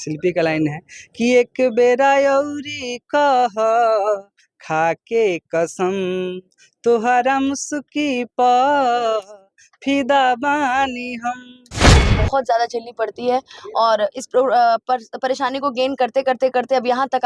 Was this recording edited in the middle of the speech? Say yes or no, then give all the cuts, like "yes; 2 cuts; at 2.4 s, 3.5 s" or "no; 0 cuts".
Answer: yes; 1 cut; at 12.0 s